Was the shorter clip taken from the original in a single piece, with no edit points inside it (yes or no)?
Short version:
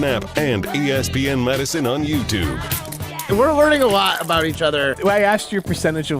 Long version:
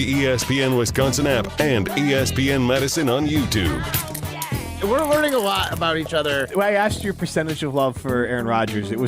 no